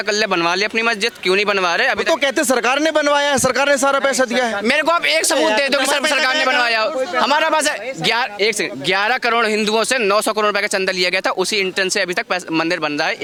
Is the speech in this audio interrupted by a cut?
no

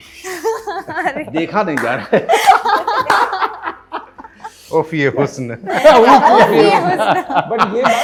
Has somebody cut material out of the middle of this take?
no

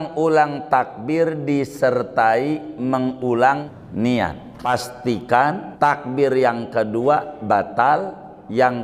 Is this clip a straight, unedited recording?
no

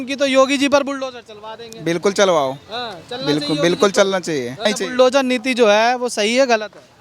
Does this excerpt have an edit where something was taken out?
yes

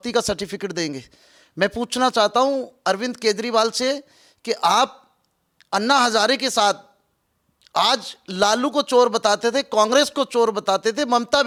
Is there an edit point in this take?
no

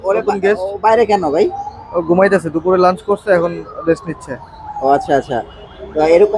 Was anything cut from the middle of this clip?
no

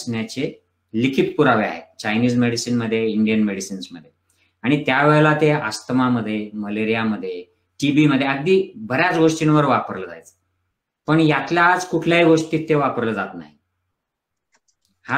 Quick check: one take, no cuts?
yes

